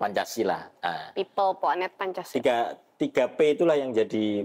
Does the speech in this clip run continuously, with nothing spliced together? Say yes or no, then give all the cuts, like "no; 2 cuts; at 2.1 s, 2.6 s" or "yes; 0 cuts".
yes; 0 cuts